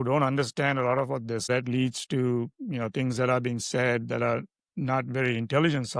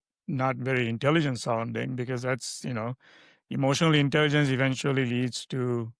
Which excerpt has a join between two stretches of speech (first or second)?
first